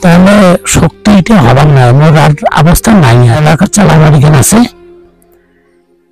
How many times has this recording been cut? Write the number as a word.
one